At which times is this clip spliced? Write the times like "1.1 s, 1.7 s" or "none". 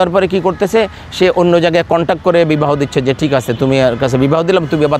none